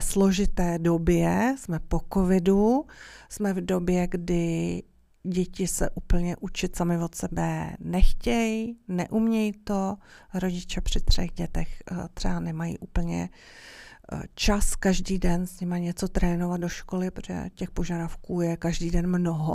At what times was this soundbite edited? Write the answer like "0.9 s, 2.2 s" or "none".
none